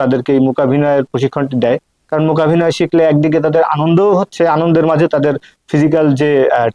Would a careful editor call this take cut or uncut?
uncut